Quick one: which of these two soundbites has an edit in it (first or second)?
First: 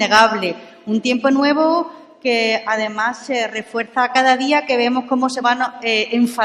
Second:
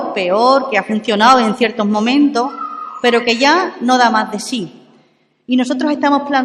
second